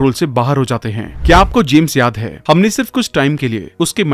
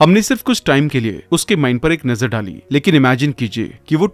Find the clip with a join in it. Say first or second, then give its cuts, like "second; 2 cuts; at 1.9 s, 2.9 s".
first; 1 cut; at 1.1 s